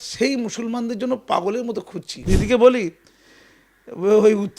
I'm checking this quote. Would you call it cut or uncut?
cut